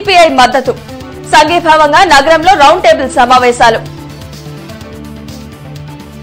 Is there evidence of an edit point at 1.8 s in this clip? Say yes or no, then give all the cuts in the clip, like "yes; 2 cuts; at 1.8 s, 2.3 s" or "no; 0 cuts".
no; 1 cut; at 3.8 s